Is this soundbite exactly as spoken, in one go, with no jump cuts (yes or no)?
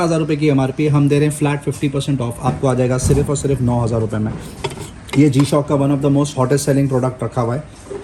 yes